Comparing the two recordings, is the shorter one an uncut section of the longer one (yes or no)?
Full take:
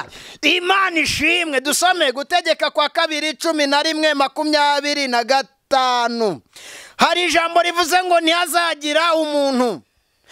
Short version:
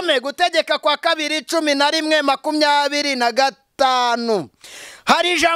yes